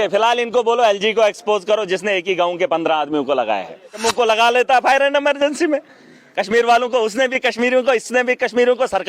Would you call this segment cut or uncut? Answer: cut